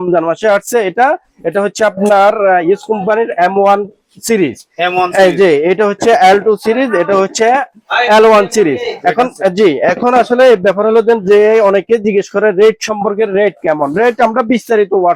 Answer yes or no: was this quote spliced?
no